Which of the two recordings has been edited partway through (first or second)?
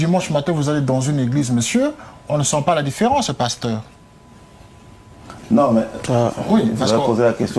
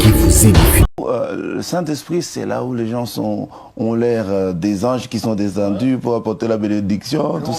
second